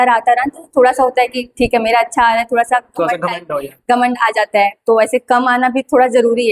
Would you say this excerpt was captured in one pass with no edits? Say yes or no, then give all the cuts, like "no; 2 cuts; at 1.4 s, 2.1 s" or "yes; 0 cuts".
yes; 0 cuts